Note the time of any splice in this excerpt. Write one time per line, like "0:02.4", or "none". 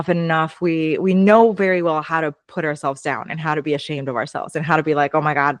none

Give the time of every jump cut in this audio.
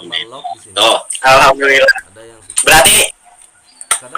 0:03.1

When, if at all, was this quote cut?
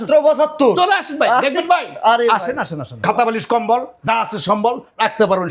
0:03.0

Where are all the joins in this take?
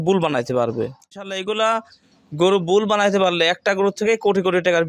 0:01.0

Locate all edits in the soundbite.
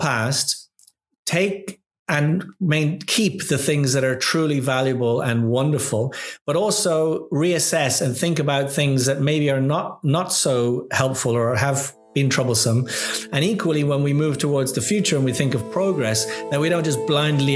none

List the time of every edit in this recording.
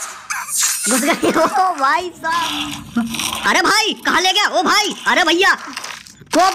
0:02.3

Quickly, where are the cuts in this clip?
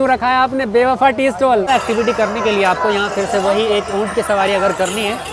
0:01.7

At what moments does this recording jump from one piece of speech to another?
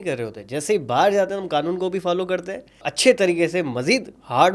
0:02.9

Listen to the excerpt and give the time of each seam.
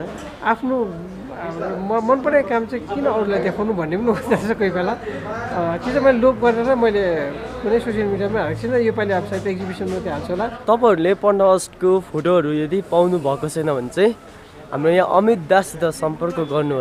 0:10.7

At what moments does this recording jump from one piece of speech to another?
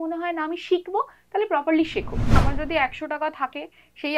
0:02.4

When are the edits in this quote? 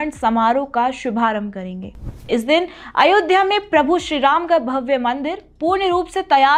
none

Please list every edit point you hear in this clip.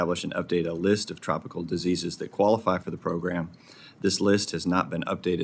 none

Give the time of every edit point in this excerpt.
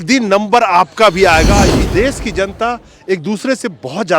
0:01.8

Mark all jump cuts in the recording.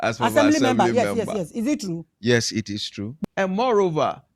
0:03.0

